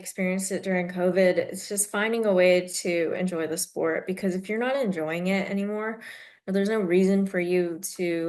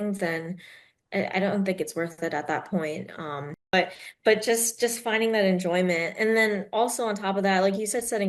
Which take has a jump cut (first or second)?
second